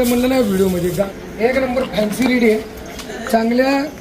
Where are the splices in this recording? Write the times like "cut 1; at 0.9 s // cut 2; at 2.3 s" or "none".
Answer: cut 1; at 1.1 s